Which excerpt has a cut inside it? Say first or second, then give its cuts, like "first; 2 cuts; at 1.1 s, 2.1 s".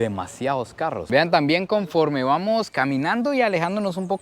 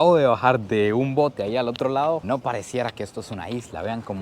first; 1 cut; at 1.0 s